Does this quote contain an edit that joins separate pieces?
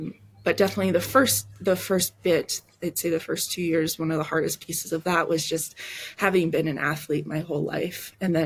no; 0 cuts

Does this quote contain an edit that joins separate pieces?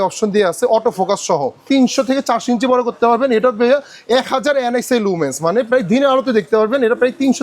yes; 1 cut; at 1.6 s

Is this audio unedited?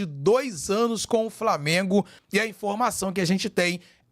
no; 1 cut; at 2.2 s

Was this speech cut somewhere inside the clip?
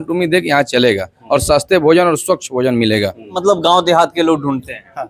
yes; 1 cut; at 3.3 s

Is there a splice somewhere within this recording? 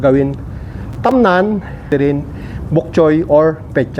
yes; 1 cut; at 1.9 s

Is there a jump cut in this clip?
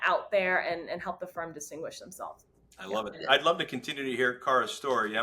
yes; 1 cut; at 3.2 s

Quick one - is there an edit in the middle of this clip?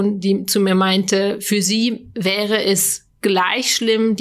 no; 0 cuts

